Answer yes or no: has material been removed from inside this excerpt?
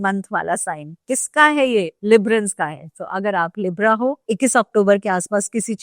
yes